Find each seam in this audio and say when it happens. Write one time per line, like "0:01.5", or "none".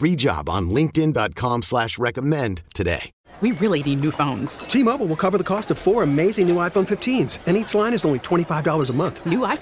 0:03.1